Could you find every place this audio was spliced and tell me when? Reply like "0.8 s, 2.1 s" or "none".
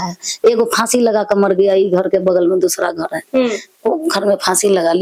none

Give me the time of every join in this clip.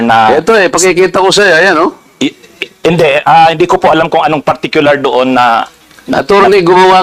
none

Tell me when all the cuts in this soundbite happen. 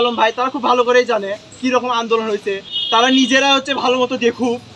2.7 s

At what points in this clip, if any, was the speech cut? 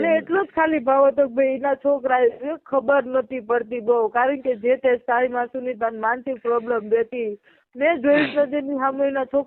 none

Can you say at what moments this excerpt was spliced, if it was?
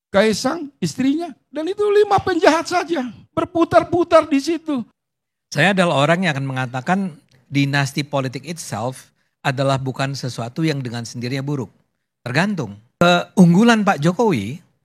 4.9 s, 13.0 s

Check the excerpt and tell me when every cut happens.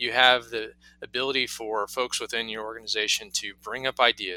none

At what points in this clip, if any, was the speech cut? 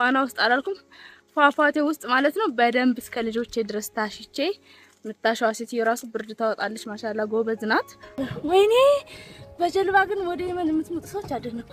8.2 s

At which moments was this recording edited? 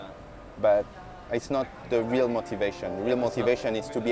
none

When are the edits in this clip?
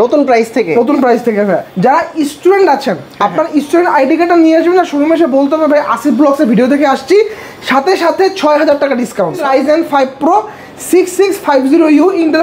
1.7 s, 9.4 s

